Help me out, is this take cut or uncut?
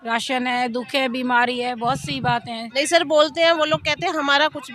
cut